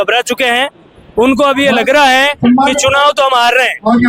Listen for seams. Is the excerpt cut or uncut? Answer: uncut